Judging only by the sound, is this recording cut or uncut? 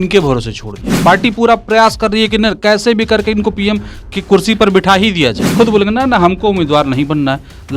cut